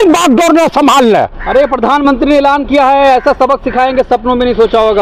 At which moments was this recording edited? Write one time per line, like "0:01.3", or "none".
none